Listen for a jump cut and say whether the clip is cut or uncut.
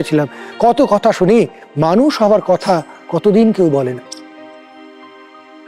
uncut